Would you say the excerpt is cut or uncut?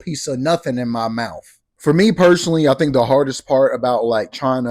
uncut